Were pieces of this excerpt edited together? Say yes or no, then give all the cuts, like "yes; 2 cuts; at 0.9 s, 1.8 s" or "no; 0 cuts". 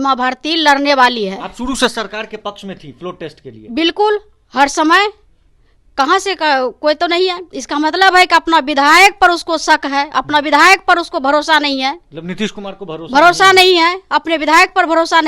no; 0 cuts